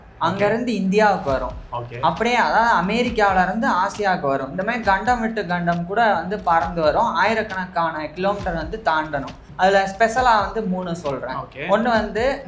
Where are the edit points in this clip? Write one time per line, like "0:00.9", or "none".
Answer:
0:09.5

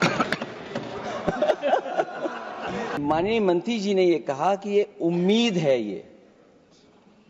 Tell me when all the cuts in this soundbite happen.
0:03.0

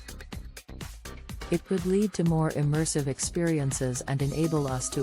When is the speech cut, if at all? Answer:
0:01.5

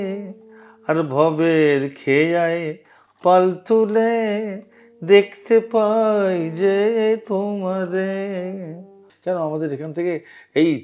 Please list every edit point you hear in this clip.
0:09.1

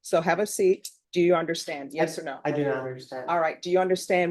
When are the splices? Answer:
0:00.9

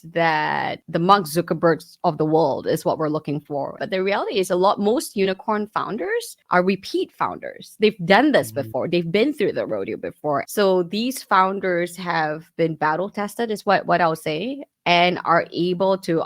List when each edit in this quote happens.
0:03.8
0:10.4

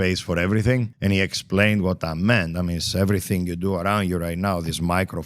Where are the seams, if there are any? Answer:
0:00.9

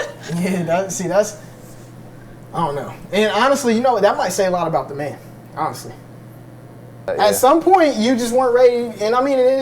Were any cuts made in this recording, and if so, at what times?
0:07.1

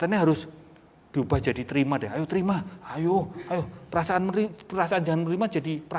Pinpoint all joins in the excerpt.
none

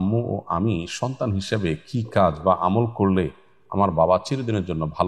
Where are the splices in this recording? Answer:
none

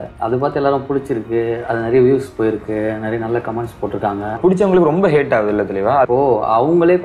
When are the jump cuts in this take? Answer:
0:04.4
0:06.1

